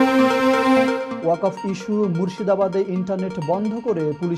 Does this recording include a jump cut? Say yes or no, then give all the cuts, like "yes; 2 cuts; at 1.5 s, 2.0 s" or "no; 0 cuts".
no; 0 cuts